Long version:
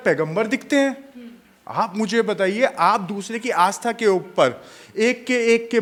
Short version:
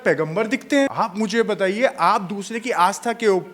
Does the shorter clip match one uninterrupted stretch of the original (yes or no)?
no